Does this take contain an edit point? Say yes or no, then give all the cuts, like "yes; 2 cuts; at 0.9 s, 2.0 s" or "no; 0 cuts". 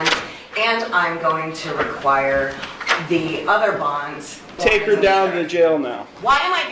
yes; 1 cut; at 4.6 s